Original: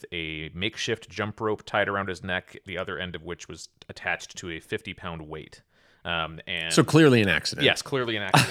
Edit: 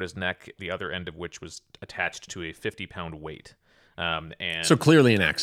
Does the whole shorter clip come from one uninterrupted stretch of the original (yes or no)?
yes